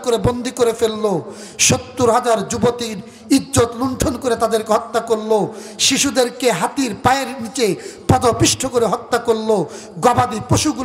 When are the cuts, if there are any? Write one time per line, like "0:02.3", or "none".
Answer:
none